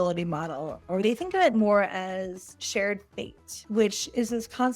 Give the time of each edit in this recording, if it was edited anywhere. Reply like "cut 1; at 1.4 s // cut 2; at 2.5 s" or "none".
cut 1; at 1.0 s